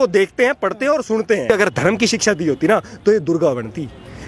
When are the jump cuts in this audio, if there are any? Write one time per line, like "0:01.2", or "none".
0:01.5